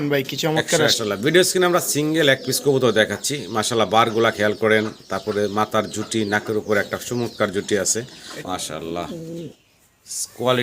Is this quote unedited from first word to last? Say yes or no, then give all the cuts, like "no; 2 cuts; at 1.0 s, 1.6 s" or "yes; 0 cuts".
no; 2 cuts; at 1.0 s, 8.2 s